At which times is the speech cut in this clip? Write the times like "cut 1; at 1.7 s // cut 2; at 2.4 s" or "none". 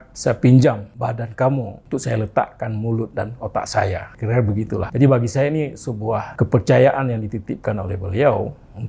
none